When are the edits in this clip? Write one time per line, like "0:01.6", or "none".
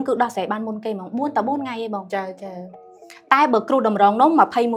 none